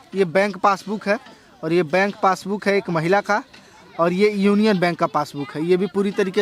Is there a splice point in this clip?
no; 0 cuts

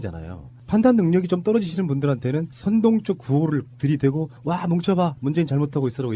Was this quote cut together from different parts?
yes; 1 cut; at 4.1 s

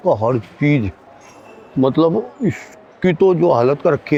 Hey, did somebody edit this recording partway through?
no; 0 cuts

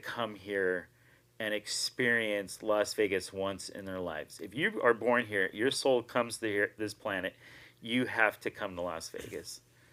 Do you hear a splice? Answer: no; 0 cuts

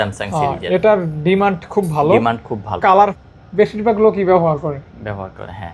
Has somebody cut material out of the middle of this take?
yes; 1 cut; at 3.2 s

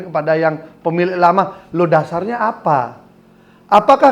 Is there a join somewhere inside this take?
no; 0 cuts

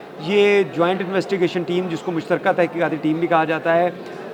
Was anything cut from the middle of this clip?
no; 0 cuts

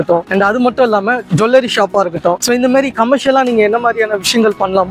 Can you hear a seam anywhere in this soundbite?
no; 0 cuts

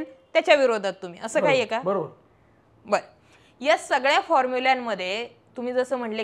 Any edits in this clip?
no; 0 cuts

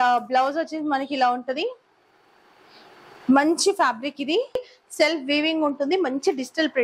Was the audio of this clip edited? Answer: yes; 1 cut; at 4.8 s

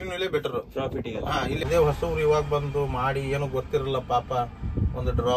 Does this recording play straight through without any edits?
no; 1 cut; at 1.6 s

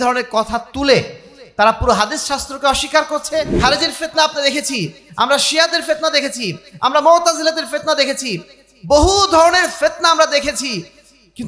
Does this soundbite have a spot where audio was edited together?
yes; 1 cut; at 3.5 s

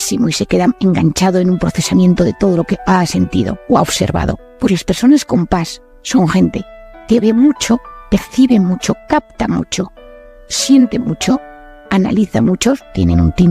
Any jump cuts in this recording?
yes; 2 cuts; at 4.5 s, 7.9 s

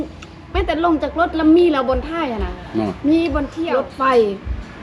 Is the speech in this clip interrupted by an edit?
yes; 1 cut; at 3.6 s

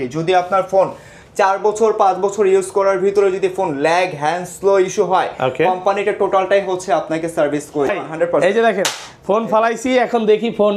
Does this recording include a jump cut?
yes; 1 cut; at 7.9 s

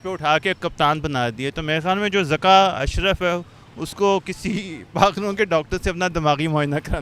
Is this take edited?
no; 0 cuts

